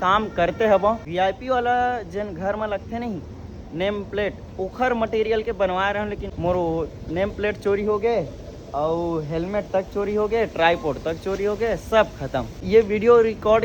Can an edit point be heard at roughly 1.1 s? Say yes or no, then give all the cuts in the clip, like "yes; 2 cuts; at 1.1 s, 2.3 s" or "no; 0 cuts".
yes; 3 cuts; at 1.1 s, 6.3 s, 12.6 s